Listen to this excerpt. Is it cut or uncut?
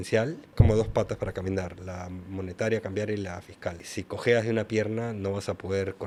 uncut